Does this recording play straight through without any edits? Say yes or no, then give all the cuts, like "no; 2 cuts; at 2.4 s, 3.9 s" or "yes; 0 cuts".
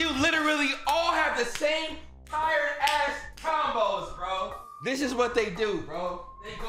no; 1 cut; at 4.7 s